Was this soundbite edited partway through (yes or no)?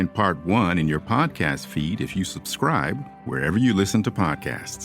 no